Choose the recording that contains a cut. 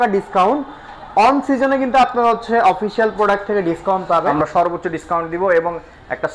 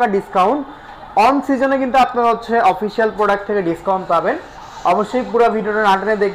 first; 1 cut; at 4.3 s

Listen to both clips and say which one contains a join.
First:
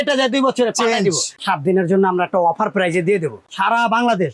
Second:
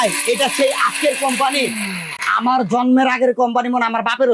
first; 2 cuts; at 1.4 s, 3.4 s

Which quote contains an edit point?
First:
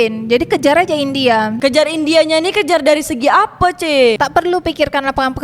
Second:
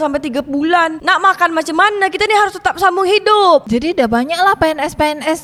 first; 1 cut; at 4.2 s

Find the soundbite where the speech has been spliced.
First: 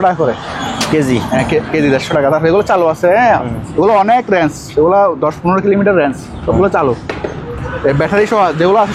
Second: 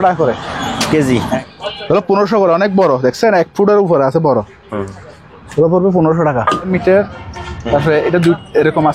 second; 2 cuts; at 1.4 s, 6.7 s

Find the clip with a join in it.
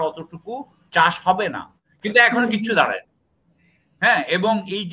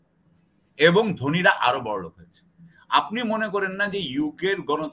first; 1 cut; at 1.8 s

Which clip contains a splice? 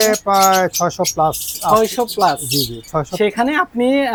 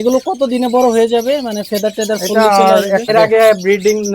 second; 1 cut; at 3.1 s

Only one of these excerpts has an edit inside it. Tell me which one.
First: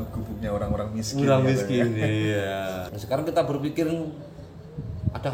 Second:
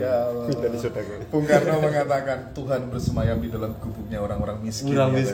first; 1 cut; at 2.9 s

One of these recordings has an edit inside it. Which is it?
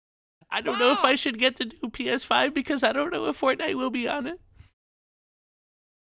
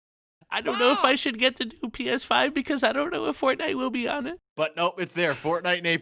second; 1 cut; at 4.4 s

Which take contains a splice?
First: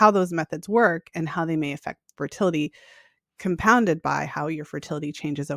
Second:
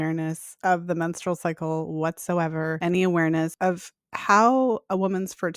second; 2 cuts; at 2.8 s, 3.5 s

